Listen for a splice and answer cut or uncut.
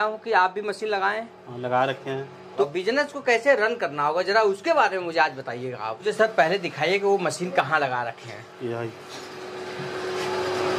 cut